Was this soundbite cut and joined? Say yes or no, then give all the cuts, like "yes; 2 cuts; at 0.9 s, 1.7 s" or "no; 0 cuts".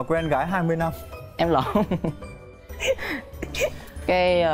no; 0 cuts